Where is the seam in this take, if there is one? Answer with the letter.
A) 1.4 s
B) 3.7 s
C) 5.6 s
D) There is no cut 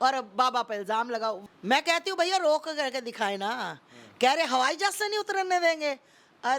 A